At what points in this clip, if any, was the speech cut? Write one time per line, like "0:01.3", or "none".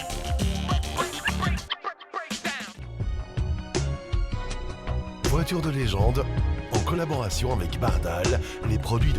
0:02.8

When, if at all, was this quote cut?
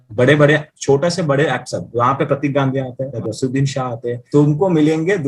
0:03.1
0:04.2

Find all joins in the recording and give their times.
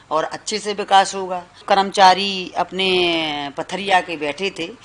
0:01.6

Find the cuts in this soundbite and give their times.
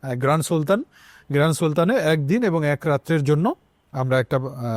none

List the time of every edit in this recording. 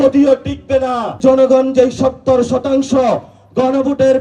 0:01.2

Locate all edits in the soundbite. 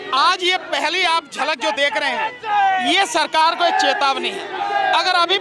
none

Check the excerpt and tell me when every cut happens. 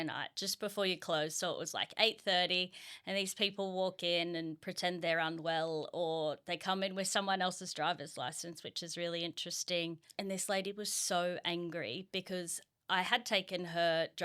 0:10.0

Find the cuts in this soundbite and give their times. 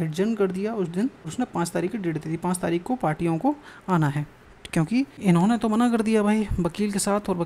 0:01.2
0:05.1

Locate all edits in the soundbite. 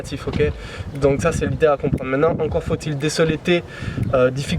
none

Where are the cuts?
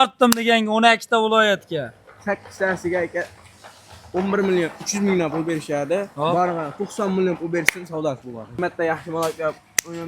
0:08.6

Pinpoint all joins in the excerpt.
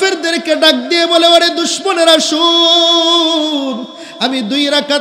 none

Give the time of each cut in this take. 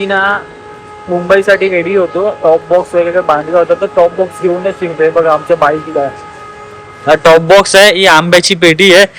none

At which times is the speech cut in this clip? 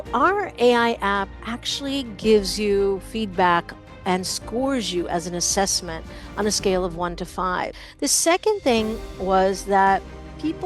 0:07.8

